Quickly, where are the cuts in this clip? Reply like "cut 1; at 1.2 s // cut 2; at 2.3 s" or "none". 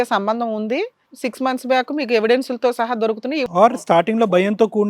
cut 1; at 3.4 s

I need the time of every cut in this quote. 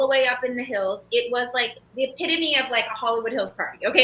cut 1; at 1.8 s

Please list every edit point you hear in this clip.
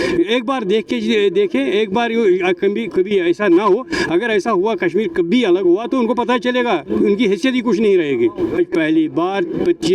cut 1; at 8.6 s

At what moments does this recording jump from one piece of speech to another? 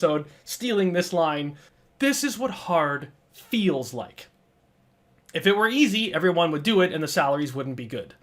cut 1; at 1.6 s

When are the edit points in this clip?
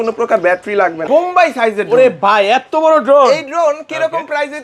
cut 1; at 1.0 s

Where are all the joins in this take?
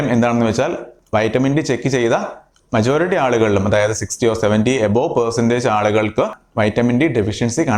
none

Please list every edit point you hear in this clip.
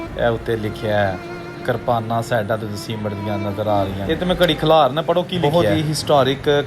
cut 1; at 4.0 s // cut 2; at 5.4 s

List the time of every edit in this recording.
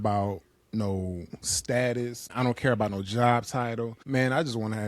cut 1; at 2.3 s // cut 2; at 4.0 s

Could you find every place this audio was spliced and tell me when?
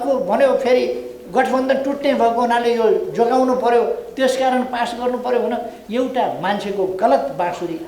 cut 1; at 5.8 s

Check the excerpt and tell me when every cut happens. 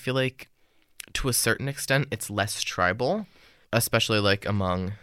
none

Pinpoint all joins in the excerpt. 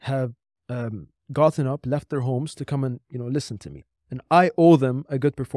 cut 1; at 3.8 s

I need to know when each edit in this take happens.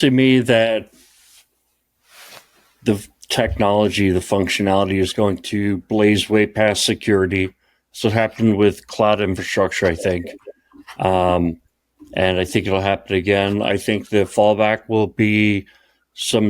none

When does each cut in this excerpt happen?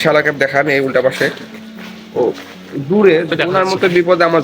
cut 1; at 3.3 s

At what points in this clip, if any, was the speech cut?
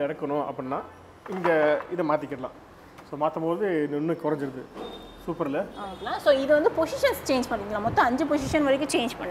cut 1; at 6.0 s

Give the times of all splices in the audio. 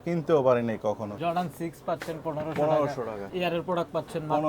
cut 1; at 1.2 s // cut 2; at 3.2 s

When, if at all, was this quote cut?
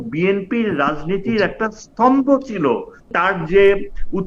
cut 1; at 3.1 s

